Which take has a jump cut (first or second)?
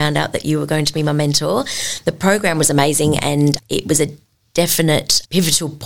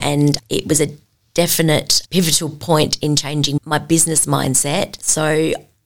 second